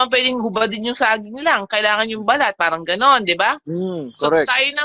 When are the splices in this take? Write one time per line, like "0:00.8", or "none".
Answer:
none

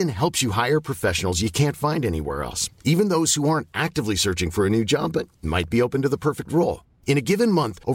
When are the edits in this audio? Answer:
none

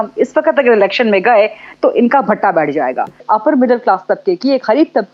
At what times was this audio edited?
0:03.2

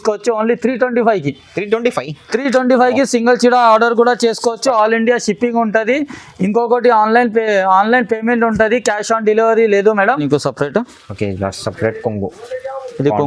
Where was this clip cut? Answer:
0:10.2

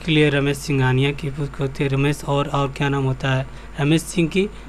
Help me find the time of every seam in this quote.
none

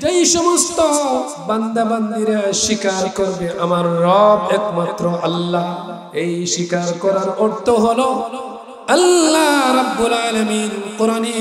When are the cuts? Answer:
0:01.4
0:05.9

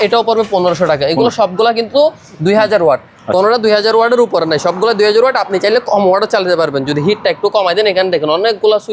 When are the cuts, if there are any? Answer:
none

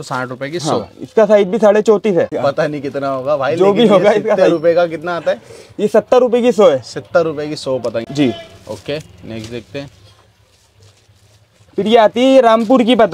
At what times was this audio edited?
0:02.3
0:08.1

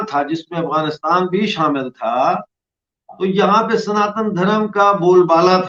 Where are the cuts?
none

